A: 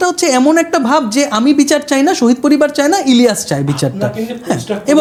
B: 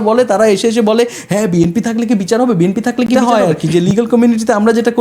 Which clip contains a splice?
B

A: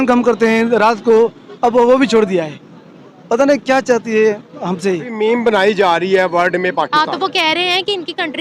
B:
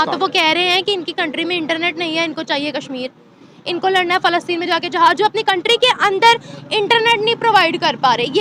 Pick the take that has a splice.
A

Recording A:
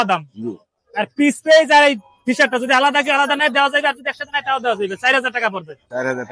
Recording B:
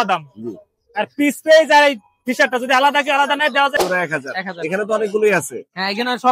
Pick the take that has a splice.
B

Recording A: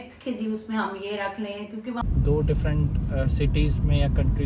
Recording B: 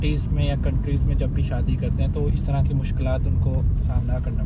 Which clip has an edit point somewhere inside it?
A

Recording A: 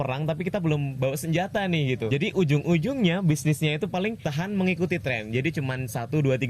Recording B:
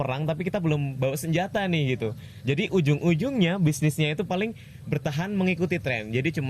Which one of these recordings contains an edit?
A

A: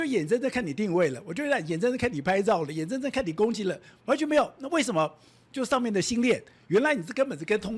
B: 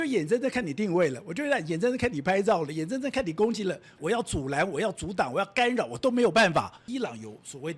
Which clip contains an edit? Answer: B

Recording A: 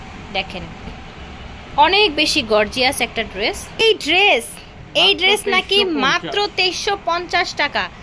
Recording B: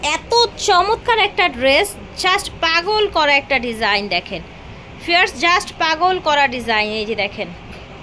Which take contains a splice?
A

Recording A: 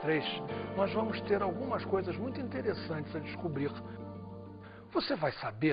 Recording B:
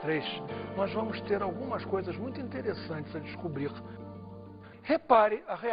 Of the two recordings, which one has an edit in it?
A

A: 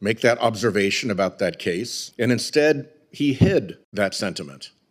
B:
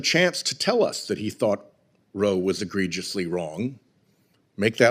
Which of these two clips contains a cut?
A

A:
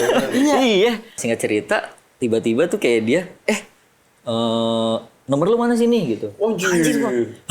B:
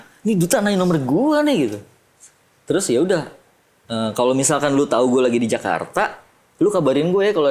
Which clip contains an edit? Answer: A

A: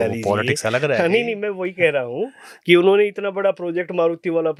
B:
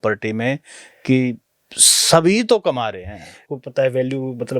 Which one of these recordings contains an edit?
B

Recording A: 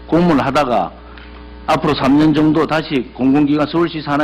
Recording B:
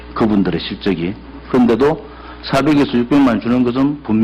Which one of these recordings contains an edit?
B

